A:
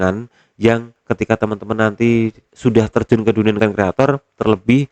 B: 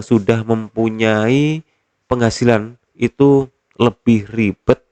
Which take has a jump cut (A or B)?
A